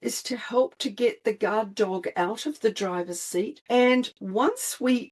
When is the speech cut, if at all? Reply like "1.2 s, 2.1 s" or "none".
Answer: 3.6 s